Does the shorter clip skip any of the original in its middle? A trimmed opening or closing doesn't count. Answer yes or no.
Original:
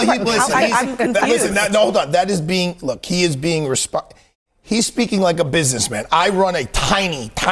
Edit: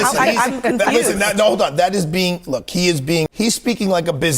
yes